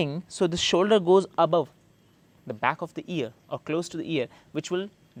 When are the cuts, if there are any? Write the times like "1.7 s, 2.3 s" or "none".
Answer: none